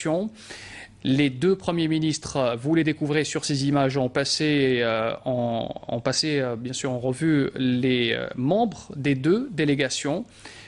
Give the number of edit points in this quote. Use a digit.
1